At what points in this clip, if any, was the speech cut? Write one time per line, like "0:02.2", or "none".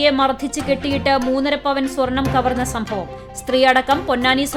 none